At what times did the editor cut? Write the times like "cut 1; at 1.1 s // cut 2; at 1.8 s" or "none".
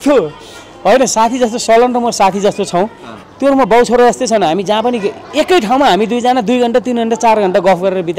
none